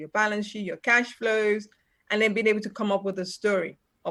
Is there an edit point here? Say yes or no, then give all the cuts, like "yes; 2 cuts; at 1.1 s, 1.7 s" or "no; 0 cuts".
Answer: no; 0 cuts